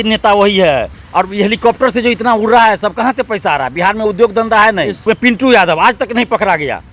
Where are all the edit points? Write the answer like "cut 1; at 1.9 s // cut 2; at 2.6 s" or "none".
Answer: cut 1; at 1.0 s // cut 2; at 5.0 s